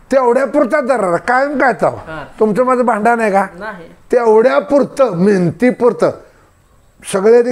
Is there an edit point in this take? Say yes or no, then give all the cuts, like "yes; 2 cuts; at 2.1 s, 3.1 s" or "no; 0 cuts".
no; 0 cuts